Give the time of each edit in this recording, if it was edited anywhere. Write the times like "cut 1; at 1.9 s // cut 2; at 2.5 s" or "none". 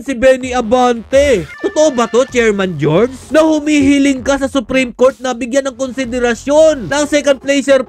cut 1; at 1.6 s // cut 2; at 3.2 s